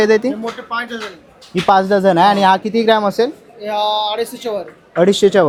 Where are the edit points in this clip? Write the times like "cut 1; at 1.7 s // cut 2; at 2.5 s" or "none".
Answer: none